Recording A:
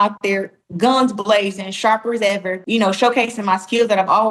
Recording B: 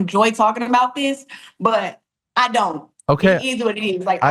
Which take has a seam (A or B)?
A